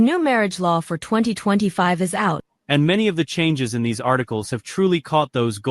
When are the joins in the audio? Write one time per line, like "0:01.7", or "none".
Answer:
0:02.5